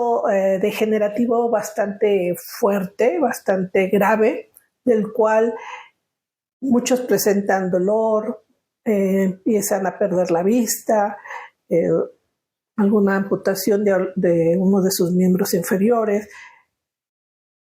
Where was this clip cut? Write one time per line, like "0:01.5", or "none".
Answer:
none